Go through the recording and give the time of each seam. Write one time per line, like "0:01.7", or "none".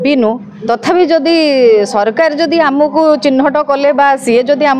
none